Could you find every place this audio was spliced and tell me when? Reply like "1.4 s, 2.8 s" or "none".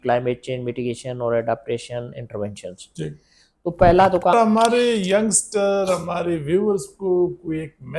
4.3 s